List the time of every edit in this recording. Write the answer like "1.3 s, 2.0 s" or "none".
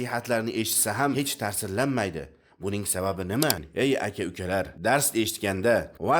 3.6 s

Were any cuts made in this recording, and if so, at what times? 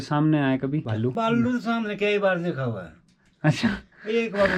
1.0 s

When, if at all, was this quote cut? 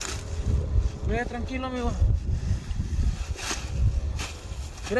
none

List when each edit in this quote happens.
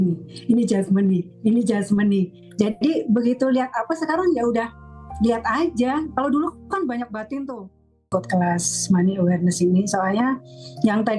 8.0 s

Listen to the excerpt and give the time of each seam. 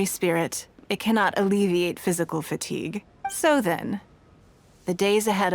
3.1 s

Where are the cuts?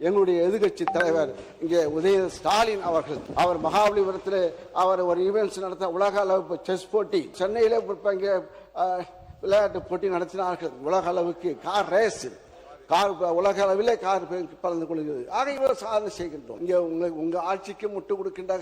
3.2 s, 7.3 s, 16.5 s

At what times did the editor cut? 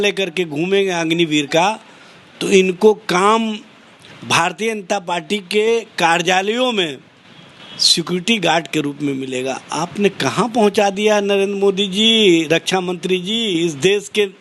none

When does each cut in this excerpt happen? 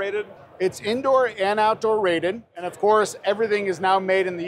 2.5 s

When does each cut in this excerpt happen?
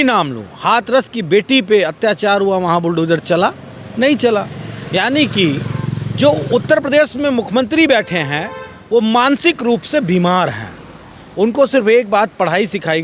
none

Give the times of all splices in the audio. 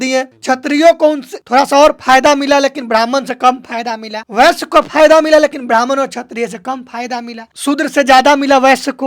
none

